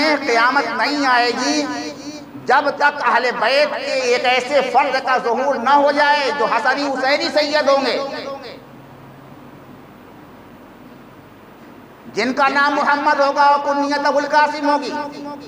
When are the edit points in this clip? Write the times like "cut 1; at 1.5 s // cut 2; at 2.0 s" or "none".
none